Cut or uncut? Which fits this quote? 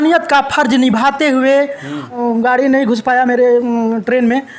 cut